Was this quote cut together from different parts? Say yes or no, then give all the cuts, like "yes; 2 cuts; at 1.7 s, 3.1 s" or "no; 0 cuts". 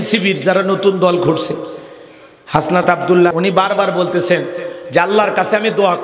yes; 1 cut; at 3.3 s